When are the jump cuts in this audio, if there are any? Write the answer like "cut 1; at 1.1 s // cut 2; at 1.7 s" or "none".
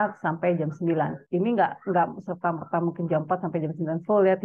cut 1; at 1.2 s